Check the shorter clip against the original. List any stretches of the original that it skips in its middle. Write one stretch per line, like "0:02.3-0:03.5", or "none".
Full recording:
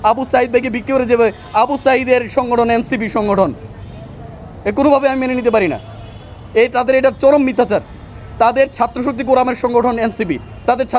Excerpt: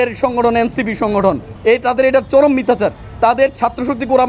0:03.6-0:06.4
0:07.9-0:08.2